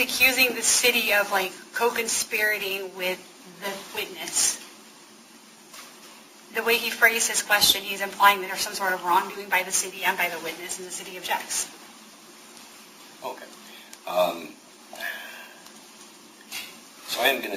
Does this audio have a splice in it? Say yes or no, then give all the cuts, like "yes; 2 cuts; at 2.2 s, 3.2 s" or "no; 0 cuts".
no; 0 cuts